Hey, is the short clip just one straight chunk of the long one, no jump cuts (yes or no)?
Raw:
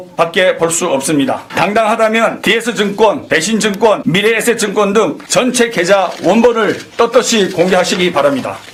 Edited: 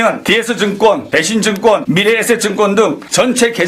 yes